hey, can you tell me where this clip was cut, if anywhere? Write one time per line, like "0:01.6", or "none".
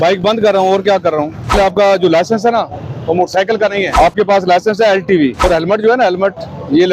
0:01.6
0:03.9
0:05.4